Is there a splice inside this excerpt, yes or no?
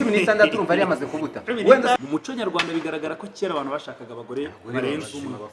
yes